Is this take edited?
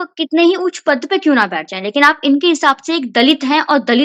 no; 0 cuts

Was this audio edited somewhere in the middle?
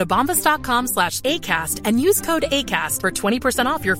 no; 0 cuts

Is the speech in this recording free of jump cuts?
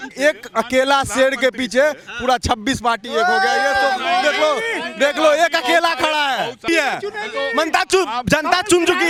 yes; 0 cuts

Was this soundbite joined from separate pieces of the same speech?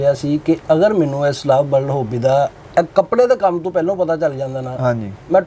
no; 0 cuts

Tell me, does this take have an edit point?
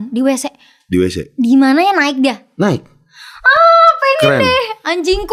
no; 0 cuts

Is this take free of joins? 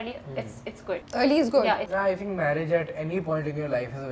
no; 2 cuts; at 1.1 s, 1.9 s

